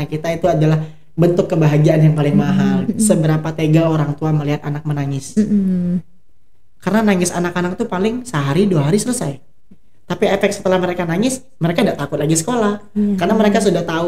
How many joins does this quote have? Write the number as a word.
one